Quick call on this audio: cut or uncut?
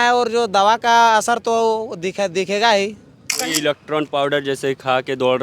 cut